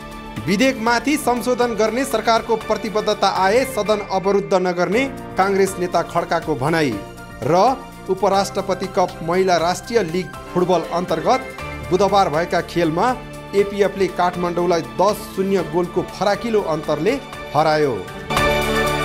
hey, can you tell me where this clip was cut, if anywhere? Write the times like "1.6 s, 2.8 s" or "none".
18.1 s